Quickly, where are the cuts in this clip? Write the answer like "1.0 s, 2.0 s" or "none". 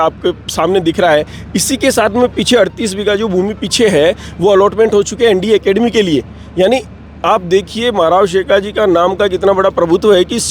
none